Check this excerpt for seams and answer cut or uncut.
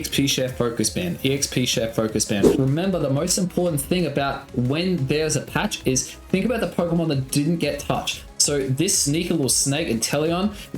cut